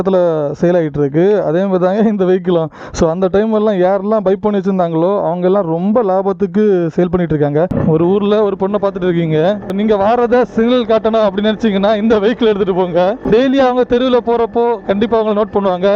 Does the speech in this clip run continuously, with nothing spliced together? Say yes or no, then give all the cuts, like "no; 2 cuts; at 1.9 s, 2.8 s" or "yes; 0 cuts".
no; 2 cuts; at 7.8 s, 9.7 s